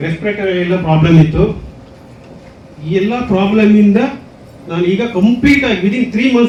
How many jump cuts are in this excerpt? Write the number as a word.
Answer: zero